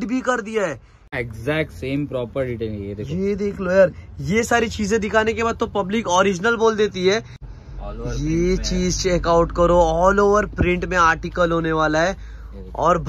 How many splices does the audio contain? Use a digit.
2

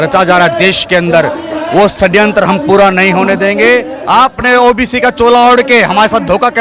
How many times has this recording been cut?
1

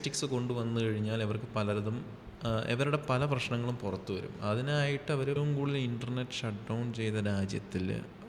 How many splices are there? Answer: 1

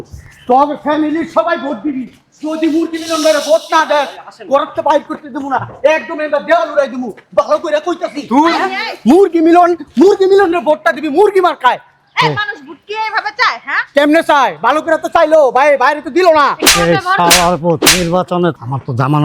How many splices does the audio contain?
0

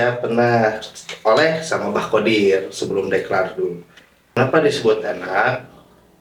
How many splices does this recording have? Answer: 1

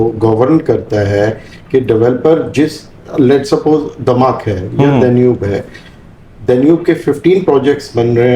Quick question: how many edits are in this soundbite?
0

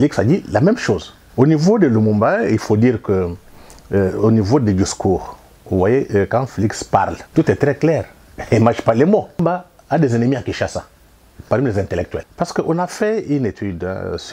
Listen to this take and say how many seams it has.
4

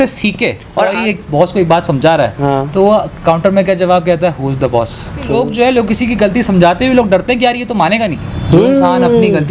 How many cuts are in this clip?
3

